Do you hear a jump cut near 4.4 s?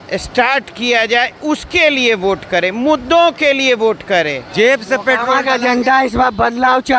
yes; 1 cut; at 4.4 s

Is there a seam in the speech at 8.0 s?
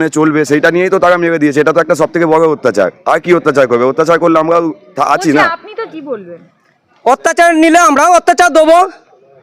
no; 1 cut; at 5.8 s

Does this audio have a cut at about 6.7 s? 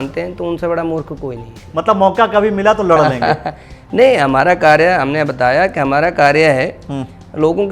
no; 1 cut; at 1.6 s

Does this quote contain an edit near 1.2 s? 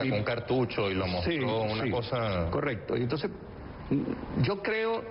no; 1 cut; at 3.0 s

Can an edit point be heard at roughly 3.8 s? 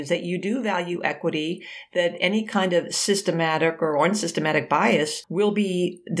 no; 1 cut; at 5.2 s

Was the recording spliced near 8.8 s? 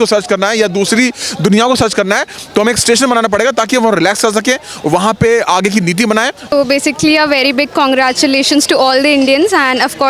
no; 1 cut; at 6.5 s

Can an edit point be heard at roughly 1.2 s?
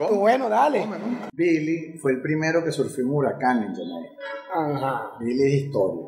yes; 1 cut; at 1.2 s

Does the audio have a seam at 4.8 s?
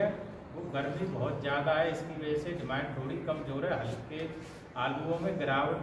no; 0 cuts

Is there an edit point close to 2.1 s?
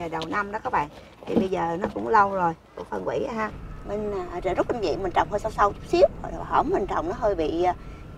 no; 1 cut; at 3.5 s

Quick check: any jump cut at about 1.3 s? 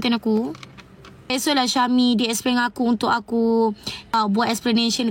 yes; 2 cuts; at 1.3 s, 4.1 s

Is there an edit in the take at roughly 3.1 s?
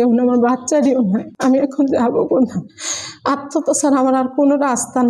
no; 1 cut; at 1.3 s

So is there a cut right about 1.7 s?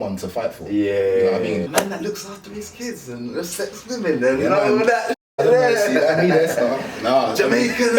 yes; 1 cut; at 1.7 s

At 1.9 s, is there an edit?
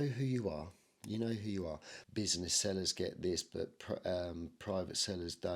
yes; 1 cut; at 1.9 s

